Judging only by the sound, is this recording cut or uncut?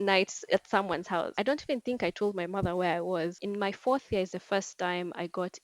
cut